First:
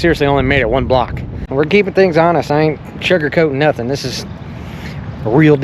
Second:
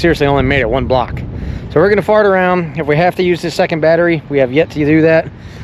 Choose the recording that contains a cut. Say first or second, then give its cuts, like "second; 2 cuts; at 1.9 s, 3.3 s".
first; 1 cut; at 1.4 s